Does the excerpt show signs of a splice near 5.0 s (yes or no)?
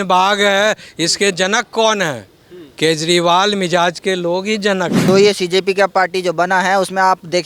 yes